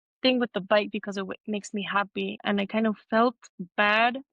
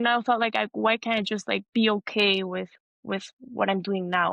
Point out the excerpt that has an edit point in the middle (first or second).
first